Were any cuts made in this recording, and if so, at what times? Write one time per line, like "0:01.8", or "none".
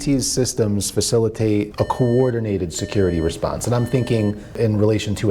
0:01.7
0:04.6